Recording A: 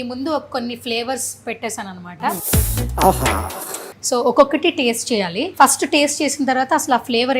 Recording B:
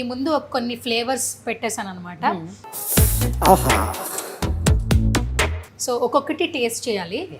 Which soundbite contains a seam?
A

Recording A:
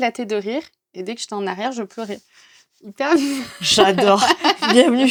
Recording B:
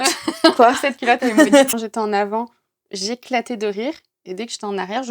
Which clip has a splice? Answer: B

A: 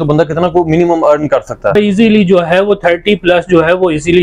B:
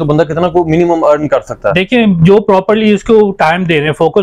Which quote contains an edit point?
A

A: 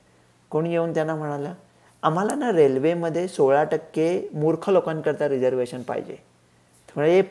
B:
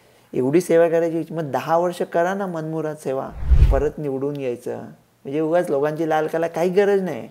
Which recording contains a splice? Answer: B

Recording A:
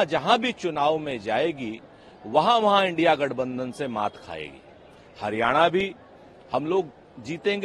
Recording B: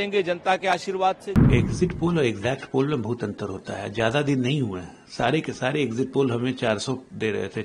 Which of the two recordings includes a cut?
B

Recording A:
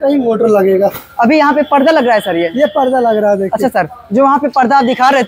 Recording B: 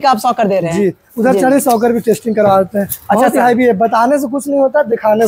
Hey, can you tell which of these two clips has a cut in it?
A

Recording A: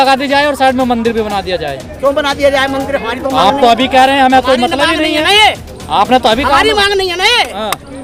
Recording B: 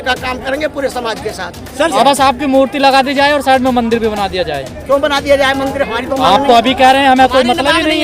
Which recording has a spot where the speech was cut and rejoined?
B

